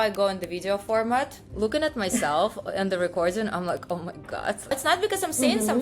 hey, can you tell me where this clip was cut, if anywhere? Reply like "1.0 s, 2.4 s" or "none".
4.7 s